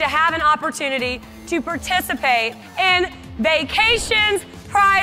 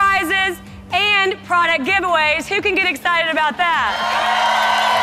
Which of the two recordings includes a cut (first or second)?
first